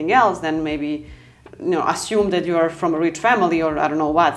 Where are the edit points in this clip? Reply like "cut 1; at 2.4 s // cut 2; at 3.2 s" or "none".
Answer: none